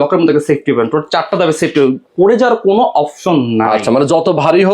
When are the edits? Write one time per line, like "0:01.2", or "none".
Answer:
none